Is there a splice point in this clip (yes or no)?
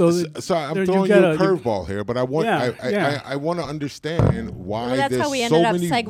no